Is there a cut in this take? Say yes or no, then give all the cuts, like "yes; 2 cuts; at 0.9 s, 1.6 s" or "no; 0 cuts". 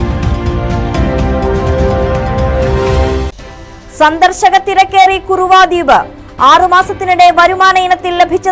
yes; 1 cut; at 3.5 s